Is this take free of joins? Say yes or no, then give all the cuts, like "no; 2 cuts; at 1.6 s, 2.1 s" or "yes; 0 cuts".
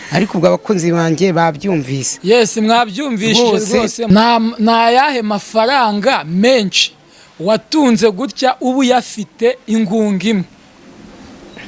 no; 1 cut; at 4.1 s